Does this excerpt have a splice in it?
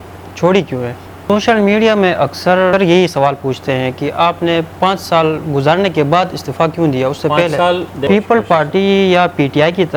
yes; 3 cuts; at 1.2 s, 2.7 s, 7.9 s

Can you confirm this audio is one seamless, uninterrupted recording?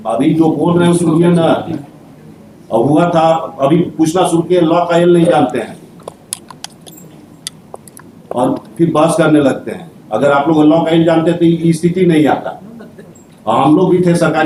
yes; 0 cuts

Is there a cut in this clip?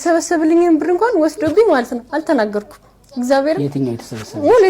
no; 0 cuts

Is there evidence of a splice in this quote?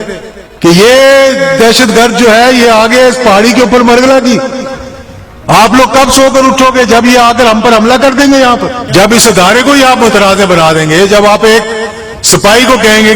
yes; 1 cut; at 8.8 s

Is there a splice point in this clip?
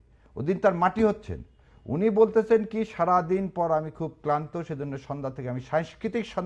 no; 0 cuts

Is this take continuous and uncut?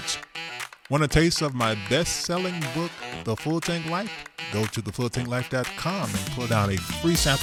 yes; 0 cuts

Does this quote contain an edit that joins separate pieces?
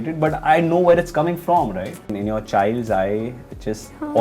yes; 1 cut; at 2.1 s

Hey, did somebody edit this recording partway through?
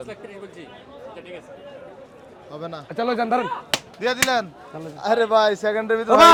no; 0 cuts

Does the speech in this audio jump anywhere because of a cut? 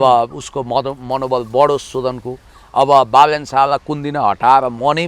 no; 0 cuts

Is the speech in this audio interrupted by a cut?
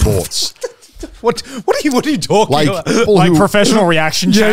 yes; 1 cut; at 3.1 s

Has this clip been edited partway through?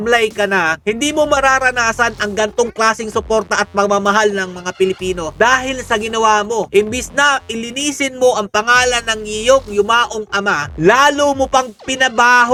no; 0 cuts

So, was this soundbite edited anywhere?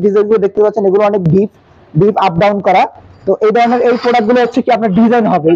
no; 0 cuts

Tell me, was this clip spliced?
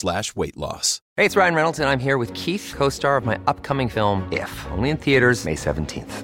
yes; 1 cut; at 0.9 s

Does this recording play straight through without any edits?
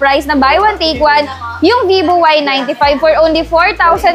yes; 0 cuts

